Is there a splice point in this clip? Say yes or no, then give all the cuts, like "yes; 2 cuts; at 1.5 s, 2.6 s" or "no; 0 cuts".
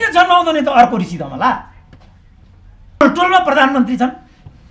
yes; 1 cut; at 3.0 s